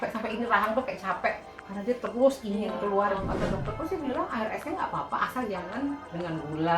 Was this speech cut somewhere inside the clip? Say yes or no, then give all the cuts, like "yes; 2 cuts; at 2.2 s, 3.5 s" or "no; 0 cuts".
yes; 1 cut; at 3.3 s